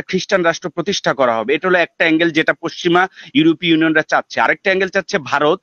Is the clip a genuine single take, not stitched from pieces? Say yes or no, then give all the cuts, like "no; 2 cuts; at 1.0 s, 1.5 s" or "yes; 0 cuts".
yes; 0 cuts